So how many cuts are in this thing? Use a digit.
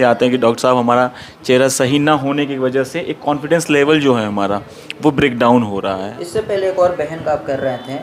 1